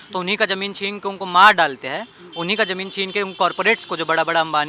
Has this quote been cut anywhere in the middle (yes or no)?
no